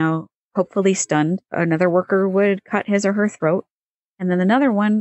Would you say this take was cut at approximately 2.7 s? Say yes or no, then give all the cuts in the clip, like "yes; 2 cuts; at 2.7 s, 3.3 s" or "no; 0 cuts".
no; 1 cut; at 1.5 s